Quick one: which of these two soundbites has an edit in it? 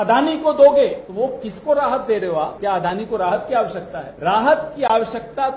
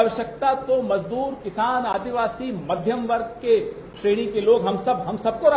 first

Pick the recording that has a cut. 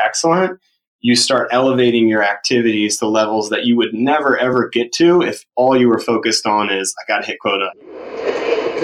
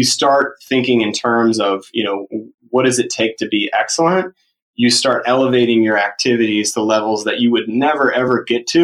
first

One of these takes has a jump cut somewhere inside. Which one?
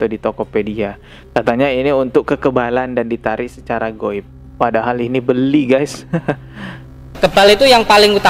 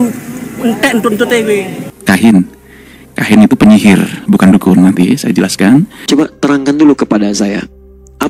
second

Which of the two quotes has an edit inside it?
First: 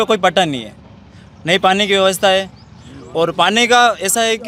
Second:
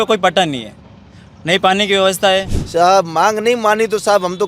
second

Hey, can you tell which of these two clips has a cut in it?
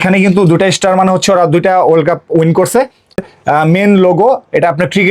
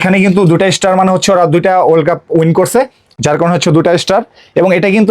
first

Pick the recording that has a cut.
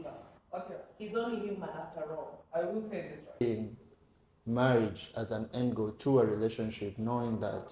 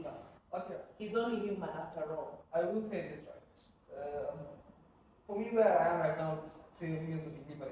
first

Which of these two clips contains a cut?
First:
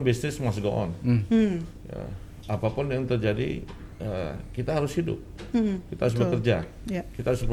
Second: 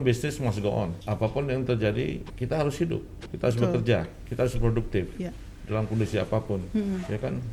second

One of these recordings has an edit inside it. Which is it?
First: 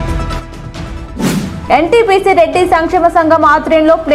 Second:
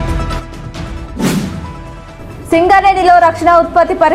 first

